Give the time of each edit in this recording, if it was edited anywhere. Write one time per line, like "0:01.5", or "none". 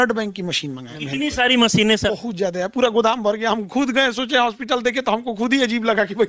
0:00.9
0:02.1